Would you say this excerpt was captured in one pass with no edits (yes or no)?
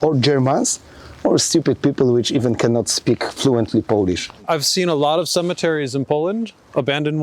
no